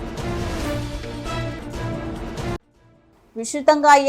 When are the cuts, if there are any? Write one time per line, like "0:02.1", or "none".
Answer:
0:02.7